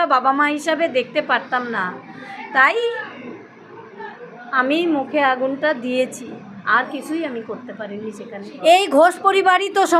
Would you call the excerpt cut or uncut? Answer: cut